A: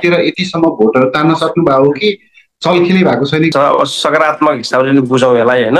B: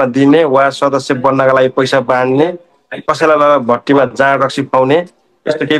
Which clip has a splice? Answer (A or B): A